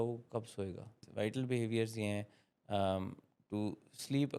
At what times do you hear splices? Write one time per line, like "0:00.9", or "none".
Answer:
0:01.0